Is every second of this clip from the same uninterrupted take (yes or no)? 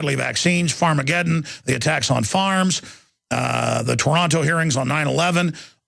no